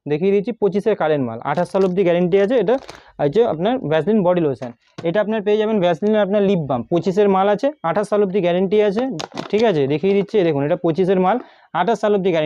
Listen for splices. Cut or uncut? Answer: uncut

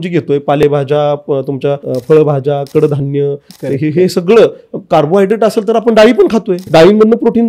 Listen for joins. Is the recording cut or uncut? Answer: cut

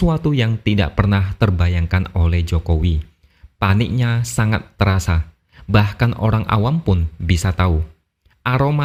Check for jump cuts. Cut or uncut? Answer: uncut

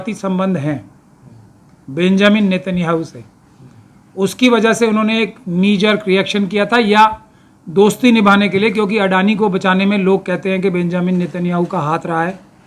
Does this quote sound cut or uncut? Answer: uncut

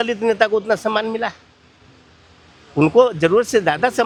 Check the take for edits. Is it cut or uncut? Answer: uncut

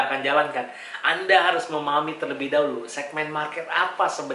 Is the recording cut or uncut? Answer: uncut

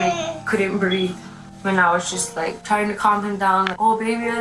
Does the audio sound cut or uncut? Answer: uncut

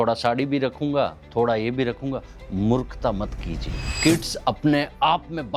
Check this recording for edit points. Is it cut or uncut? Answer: uncut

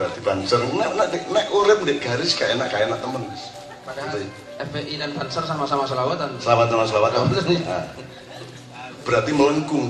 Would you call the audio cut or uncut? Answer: uncut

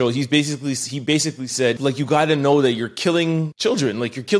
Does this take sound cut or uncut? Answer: cut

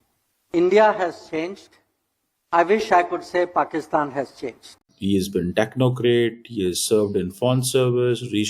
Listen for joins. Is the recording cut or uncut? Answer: cut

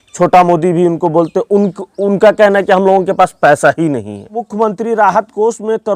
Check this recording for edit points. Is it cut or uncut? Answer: cut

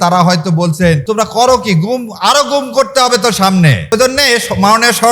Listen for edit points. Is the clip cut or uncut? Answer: cut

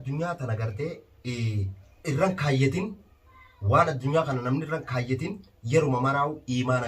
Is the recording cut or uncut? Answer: cut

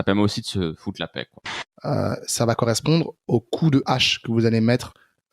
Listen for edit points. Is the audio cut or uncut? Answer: cut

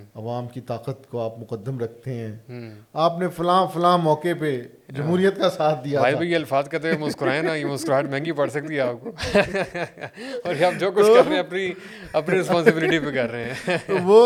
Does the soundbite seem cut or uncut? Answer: uncut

